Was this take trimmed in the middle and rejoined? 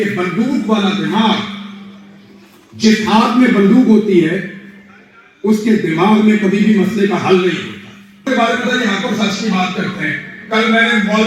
yes; 1 cut; at 8.3 s

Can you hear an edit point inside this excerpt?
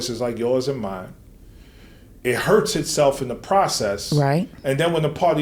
no; 0 cuts

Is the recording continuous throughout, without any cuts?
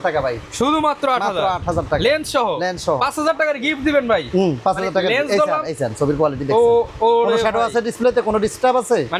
yes; 0 cuts

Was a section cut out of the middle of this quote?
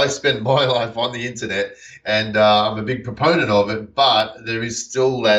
no; 0 cuts

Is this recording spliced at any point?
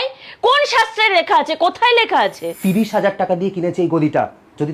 yes; 1 cut; at 2.5 s

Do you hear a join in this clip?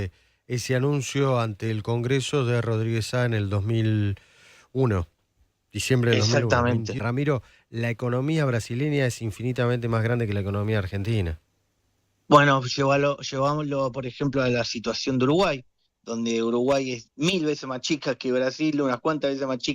yes; 1 cut; at 7.0 s

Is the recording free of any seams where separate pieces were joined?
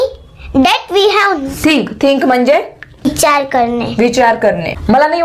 no; 1 cut; at 1.4 s

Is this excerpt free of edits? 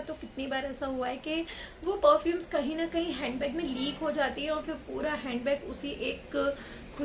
yes; 0 cuts

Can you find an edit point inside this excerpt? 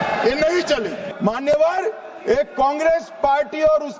no; 0 cuts

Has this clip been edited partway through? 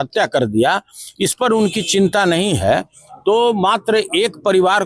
no; 0 cuts

